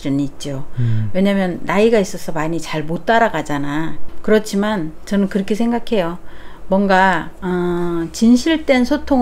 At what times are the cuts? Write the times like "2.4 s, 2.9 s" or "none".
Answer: 4.0 s